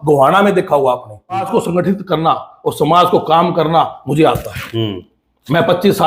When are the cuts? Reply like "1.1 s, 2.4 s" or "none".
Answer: 1.4 s